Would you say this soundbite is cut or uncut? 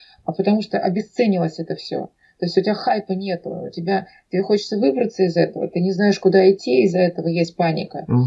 uncut